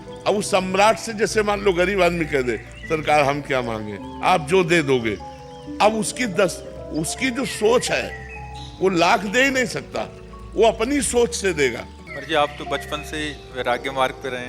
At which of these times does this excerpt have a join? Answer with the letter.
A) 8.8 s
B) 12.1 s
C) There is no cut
B